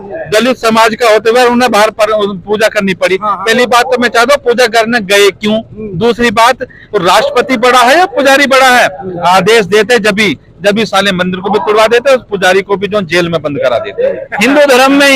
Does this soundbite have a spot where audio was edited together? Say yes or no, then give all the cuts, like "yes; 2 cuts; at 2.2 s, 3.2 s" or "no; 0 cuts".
yes; 1 cut; at 14.2 s